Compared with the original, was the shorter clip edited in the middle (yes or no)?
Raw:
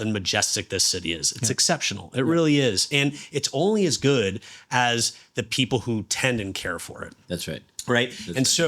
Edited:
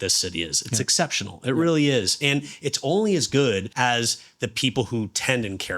yes